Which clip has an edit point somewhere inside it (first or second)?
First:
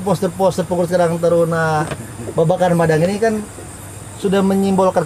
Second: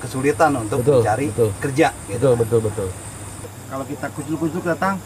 second